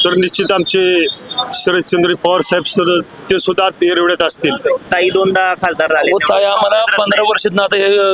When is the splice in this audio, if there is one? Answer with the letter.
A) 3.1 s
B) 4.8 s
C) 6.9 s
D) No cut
B